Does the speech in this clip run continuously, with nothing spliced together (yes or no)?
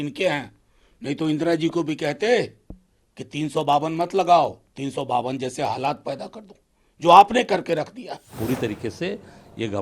no